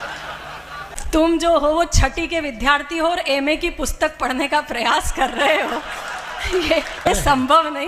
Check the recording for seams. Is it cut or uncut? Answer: cut